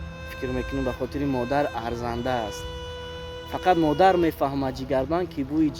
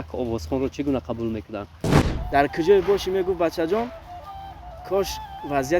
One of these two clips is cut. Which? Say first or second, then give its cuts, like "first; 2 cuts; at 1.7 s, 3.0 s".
second; 1 cut; at 2.0 s